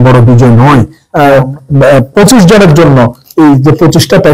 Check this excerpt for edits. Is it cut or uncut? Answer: cut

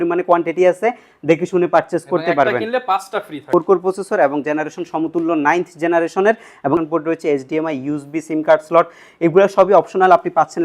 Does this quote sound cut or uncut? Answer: cut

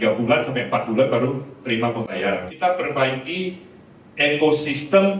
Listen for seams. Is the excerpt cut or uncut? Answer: cut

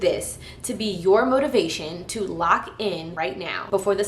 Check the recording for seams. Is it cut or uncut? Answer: cut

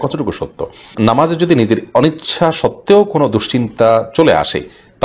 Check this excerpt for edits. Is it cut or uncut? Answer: cut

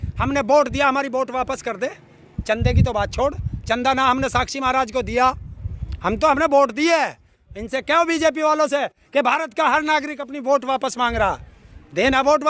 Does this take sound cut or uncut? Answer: uncut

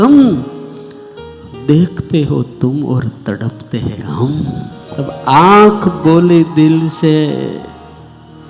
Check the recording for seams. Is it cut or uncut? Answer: cut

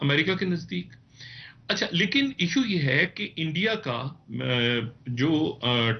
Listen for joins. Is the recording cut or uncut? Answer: uncut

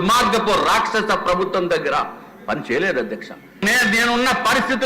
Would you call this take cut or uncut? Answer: cut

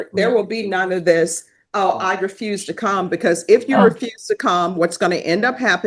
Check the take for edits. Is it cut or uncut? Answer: uncut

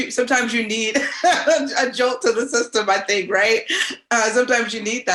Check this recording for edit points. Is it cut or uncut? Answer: uncut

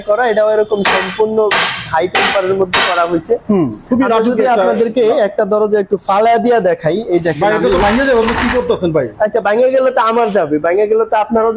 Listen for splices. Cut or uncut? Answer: uncut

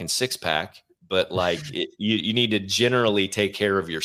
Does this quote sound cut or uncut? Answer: uncut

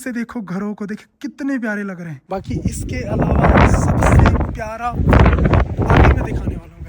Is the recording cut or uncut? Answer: cut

